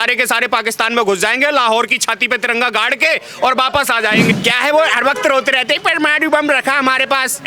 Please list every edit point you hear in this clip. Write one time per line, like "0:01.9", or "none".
0:04.3